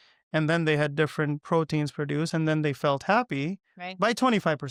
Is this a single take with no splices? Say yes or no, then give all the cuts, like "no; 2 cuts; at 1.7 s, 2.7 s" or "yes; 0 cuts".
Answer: yes; 0 cuts